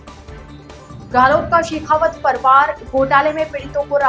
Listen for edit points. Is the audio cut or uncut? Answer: uncut